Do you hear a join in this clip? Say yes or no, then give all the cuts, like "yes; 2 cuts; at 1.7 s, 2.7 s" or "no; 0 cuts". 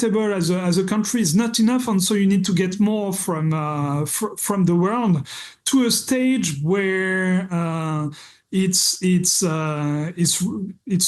no; 0 cuts